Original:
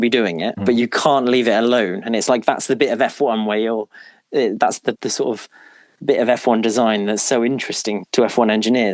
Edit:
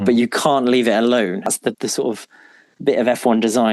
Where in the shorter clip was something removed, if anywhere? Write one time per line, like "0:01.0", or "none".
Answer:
0:01.5